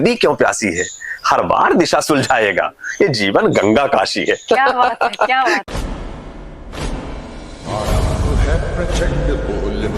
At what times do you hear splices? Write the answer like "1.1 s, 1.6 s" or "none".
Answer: 5.6 s